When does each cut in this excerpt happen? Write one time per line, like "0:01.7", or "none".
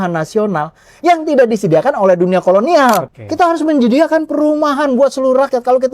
0:03.1